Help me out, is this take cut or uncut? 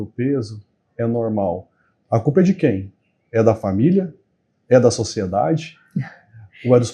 uncut